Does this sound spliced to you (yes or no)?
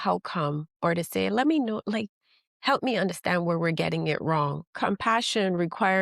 yes